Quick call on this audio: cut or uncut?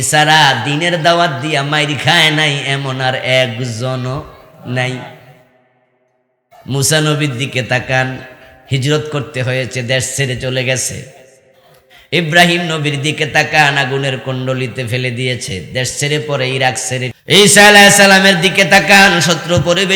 cut